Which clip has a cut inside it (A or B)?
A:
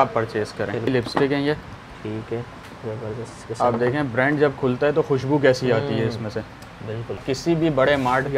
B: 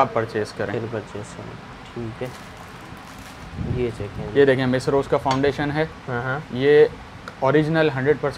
A